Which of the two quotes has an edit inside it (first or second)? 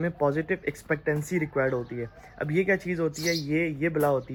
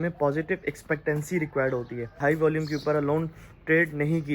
second